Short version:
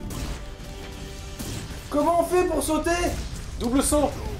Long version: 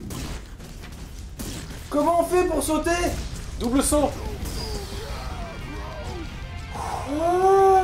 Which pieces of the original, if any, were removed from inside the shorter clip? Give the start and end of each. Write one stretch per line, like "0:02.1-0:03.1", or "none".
none